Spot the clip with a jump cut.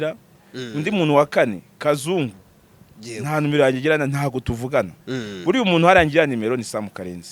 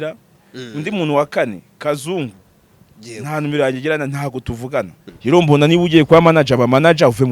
second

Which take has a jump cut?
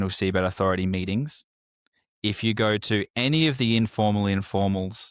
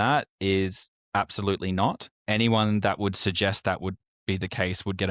second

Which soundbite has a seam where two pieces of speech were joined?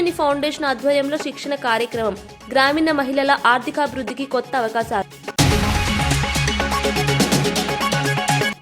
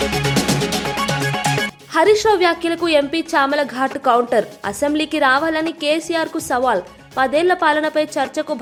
first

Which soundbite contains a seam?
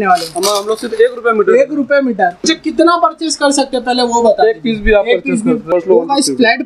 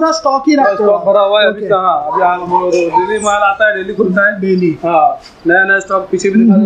first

